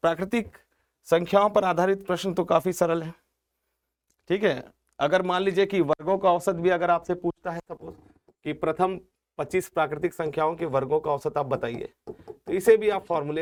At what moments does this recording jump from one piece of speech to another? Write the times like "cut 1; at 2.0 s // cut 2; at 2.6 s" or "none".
none